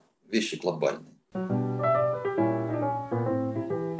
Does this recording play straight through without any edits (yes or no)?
no